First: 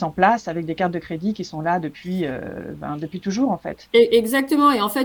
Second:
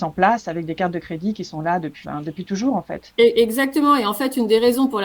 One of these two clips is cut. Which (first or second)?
second